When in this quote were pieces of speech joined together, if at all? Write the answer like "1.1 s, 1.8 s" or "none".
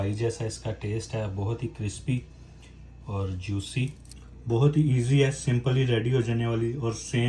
4.1 s